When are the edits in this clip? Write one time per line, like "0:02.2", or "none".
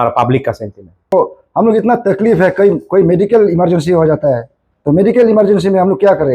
0:01.1